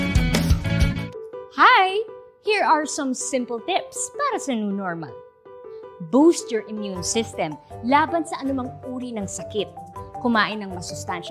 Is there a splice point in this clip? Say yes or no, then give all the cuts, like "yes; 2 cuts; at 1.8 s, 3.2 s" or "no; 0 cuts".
yes; 1 cut; at 1.0 s